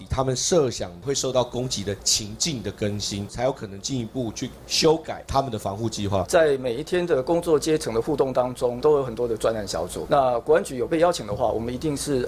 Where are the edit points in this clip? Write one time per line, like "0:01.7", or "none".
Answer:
0:00.9
0:03.3
0:05.2
0:06.3
0:08.8